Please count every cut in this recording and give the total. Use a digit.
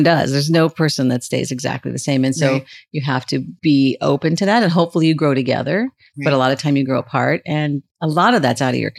0